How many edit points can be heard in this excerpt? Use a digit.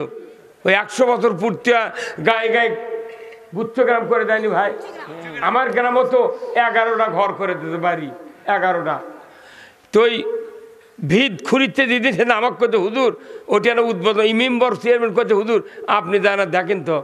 0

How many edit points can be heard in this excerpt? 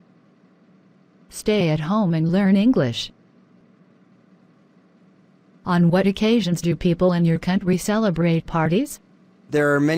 1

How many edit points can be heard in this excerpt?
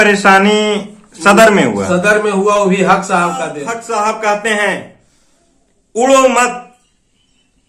1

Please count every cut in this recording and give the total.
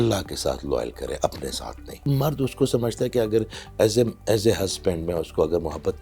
1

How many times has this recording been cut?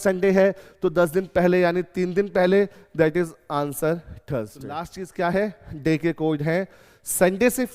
1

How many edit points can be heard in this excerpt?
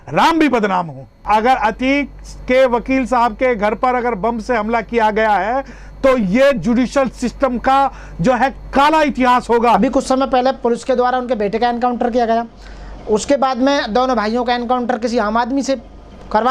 1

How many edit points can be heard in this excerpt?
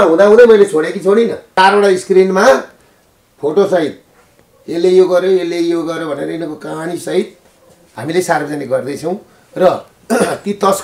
1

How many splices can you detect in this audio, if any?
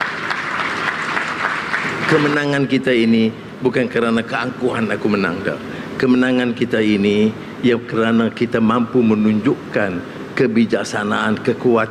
1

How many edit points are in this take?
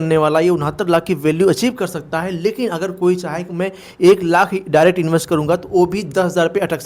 0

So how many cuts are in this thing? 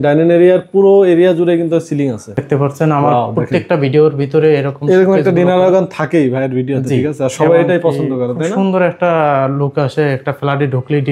1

